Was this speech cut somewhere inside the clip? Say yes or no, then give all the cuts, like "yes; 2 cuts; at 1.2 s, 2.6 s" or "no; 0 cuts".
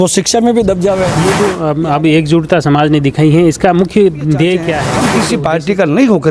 yes; 2 cuts; at 1.2 s, 5.1 s